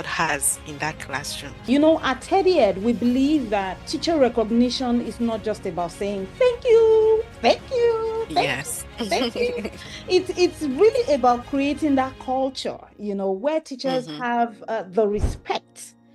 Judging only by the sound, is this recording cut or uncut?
cut